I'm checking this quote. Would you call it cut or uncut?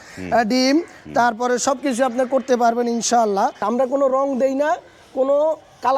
cut